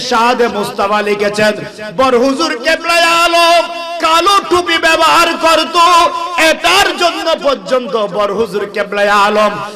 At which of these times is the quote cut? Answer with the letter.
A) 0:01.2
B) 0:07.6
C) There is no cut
C